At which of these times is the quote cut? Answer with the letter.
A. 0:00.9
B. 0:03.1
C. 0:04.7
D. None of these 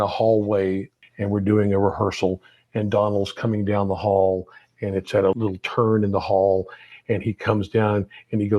A